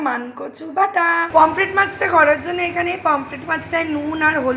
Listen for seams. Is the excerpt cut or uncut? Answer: cut